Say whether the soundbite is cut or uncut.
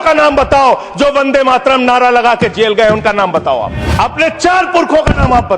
cut